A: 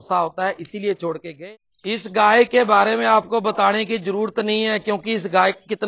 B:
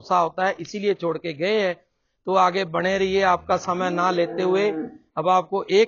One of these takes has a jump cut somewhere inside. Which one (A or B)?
A